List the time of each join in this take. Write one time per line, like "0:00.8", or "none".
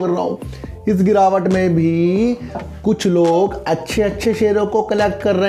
none